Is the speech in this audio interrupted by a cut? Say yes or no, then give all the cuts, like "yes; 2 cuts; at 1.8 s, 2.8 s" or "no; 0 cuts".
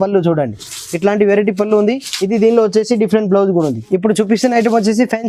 yes; 1 cut; at 3.8 s